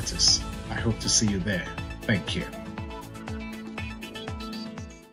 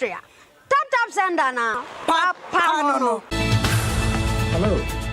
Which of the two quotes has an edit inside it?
second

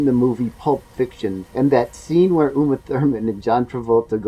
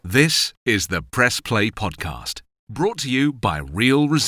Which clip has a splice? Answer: first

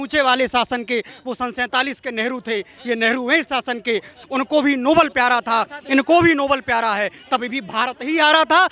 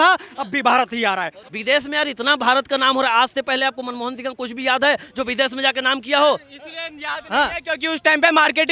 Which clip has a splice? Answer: second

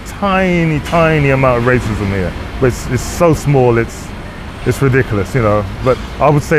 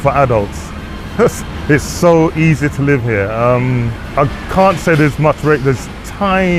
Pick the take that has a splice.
second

